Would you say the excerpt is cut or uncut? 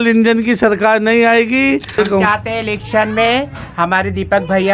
cut